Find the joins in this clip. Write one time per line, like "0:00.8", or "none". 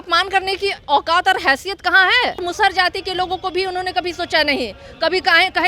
0:02.4

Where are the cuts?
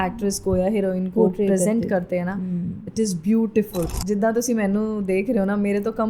0:03.9

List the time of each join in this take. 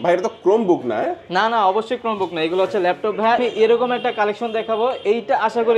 0:03.4

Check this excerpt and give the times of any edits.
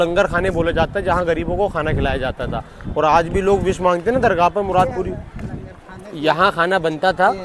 none

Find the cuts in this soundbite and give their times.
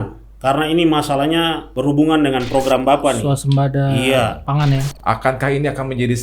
0:01.7
0:04.9

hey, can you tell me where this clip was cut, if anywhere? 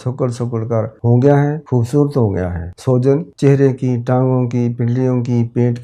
0:00.9
0:01.6
0:02.7
0:03.3

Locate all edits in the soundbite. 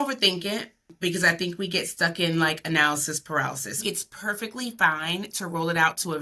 0:00.9
0:03.8

